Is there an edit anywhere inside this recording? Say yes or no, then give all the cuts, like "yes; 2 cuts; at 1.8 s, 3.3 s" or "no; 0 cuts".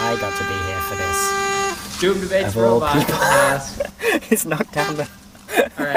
no; 0 cuts